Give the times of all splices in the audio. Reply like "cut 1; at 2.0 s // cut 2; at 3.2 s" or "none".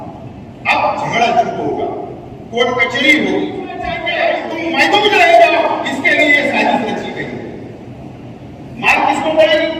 cut 1; at 4.0 s